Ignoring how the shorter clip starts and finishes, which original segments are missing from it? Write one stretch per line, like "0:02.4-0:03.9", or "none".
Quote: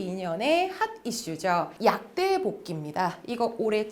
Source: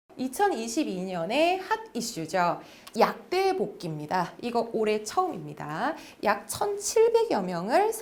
0:02.6-0:02.9